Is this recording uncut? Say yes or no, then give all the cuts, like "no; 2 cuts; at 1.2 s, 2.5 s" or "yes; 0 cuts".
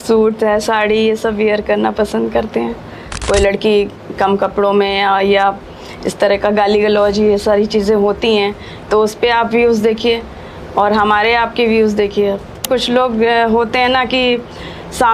no; 2 cuts; at 3.1 s, 12.6 s